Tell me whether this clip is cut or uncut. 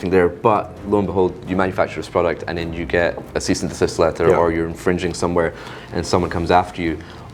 uncut